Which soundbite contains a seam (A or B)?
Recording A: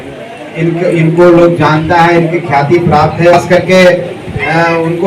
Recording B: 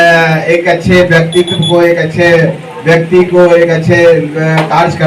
A